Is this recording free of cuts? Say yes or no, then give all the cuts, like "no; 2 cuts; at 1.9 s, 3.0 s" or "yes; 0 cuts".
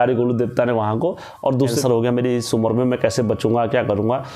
no; 1 cut; at 1.8 s